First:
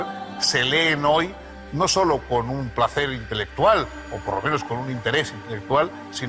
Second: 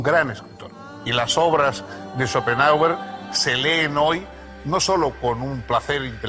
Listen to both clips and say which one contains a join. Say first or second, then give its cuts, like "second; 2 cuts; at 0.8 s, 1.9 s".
second; 1 cut; at 1.4 s